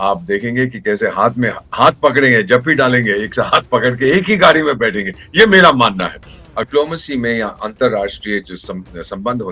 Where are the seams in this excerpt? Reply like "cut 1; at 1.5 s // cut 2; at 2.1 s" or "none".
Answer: cut 1; at 6.7 s